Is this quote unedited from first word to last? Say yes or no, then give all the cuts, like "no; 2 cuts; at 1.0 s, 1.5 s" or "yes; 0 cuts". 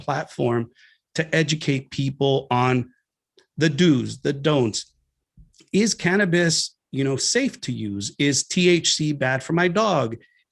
yes; 0 cuts